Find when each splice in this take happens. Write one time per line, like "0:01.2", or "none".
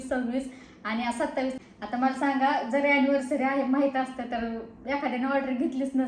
0:01.5